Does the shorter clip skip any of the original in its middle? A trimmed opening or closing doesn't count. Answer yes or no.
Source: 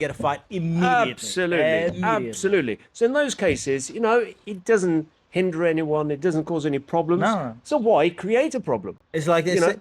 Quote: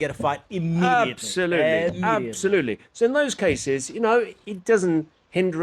no